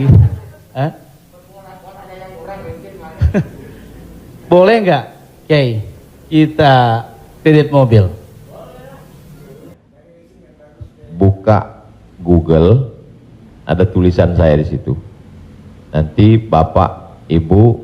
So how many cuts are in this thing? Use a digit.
1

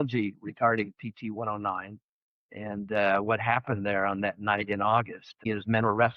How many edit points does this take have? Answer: 1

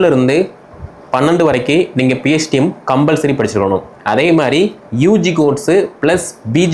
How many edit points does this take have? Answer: 0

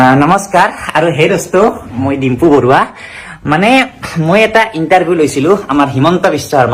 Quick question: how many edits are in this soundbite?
0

